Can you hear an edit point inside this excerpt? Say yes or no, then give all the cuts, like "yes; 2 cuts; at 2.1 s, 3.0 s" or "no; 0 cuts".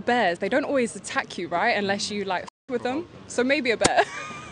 yes; 1 cut; at 1.9 s